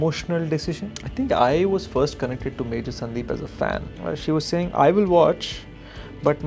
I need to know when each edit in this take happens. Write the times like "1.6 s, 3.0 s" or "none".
1.0 s, 3.9 s